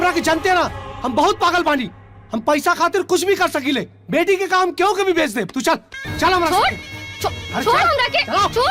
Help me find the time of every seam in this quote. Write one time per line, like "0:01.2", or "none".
none